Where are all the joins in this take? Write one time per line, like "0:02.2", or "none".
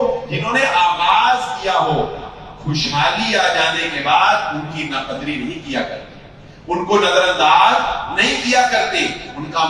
none